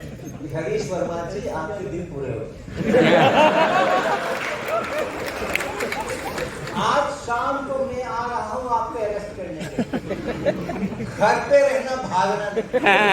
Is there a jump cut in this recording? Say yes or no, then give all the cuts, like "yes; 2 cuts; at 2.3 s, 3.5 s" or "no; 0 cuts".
no; 0 cuts